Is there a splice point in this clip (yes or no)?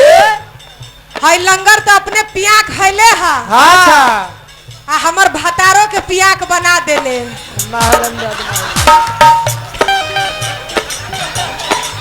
no